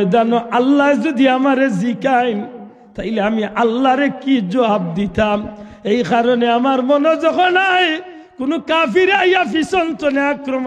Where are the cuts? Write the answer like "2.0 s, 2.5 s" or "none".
none